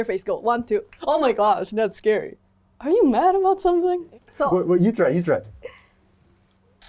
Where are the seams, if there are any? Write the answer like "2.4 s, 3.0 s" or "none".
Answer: 4.2 s